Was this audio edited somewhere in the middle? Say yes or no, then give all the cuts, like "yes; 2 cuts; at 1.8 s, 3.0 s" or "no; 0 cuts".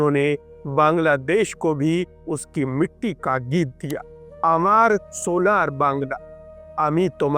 no; 0 cuts